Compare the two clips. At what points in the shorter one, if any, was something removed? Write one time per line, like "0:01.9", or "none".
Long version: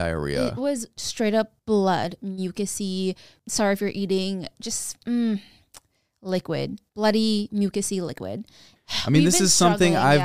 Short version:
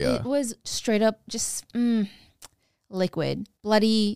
0:01.2